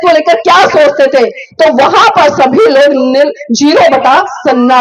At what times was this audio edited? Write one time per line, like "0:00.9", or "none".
none